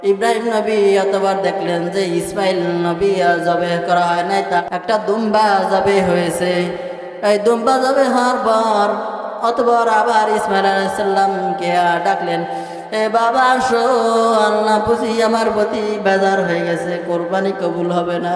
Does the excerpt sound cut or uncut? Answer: uncut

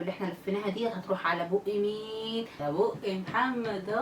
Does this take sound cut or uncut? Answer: cut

